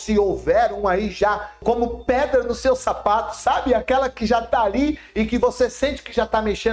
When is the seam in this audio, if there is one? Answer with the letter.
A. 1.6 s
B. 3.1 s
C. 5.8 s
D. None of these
A